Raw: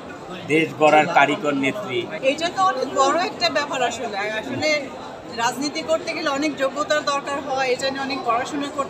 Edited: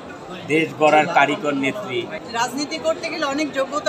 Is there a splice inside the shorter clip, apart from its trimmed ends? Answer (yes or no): yes